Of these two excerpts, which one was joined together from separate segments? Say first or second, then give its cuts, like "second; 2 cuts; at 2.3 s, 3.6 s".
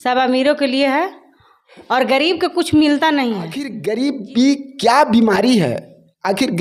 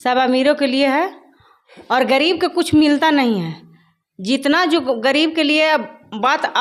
first; 1 cut; at 3.7 s